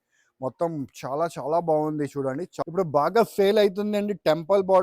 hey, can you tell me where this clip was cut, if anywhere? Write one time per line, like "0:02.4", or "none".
0:02.5